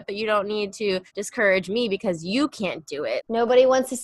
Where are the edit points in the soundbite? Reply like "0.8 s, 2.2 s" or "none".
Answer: 1.2 s, 3.2 s